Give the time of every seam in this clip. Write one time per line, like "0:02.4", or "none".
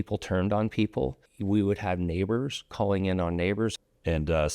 0:01.3
0:03.7